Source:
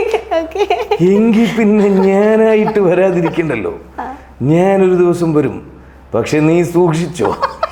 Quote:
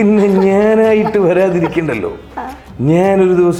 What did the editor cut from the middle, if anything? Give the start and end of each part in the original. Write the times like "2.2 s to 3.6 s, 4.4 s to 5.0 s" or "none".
none